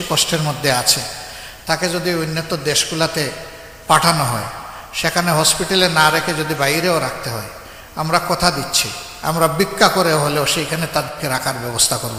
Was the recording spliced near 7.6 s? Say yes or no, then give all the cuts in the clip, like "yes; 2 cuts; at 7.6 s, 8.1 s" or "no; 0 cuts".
no; 0 cuts